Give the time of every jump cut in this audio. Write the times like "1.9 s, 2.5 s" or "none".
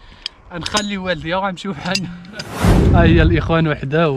2.8 s